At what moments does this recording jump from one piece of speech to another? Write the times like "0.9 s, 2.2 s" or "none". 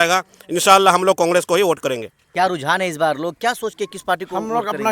2.2 s